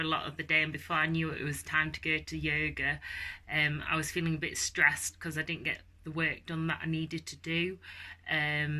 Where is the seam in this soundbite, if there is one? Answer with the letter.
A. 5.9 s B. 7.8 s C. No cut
C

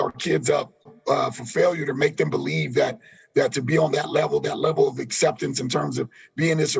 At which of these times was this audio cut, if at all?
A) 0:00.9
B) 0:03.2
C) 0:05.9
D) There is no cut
A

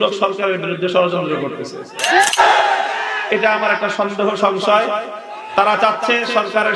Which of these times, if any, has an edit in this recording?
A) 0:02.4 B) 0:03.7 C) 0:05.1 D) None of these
A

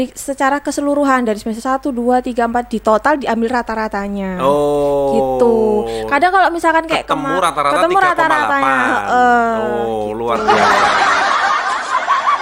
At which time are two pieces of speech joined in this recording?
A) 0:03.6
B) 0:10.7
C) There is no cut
C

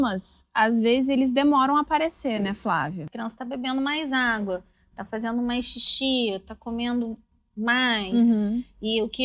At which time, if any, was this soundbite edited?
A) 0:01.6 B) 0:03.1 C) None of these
B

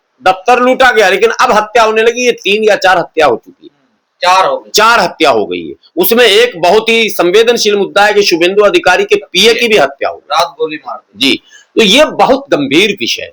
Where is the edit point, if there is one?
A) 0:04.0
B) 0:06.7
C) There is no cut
C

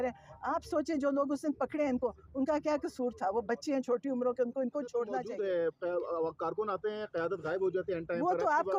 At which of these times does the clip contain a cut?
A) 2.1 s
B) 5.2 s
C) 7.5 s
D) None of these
B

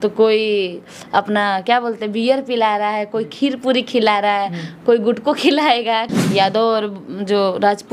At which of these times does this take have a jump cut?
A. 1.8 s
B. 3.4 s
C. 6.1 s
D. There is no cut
C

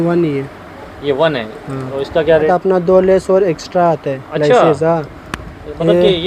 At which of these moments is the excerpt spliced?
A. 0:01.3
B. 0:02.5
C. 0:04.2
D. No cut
B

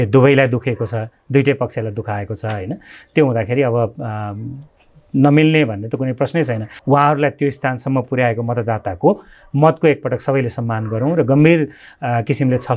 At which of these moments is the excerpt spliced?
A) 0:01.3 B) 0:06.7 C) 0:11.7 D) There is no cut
B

